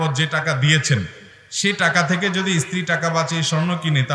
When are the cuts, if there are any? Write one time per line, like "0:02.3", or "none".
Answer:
none